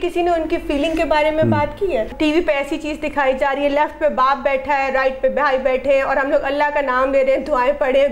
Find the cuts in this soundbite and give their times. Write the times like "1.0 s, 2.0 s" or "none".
2.1 s

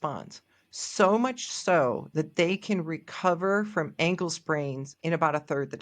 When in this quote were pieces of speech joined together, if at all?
4.9 s

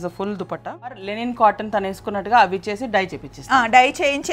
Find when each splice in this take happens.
1.1 s

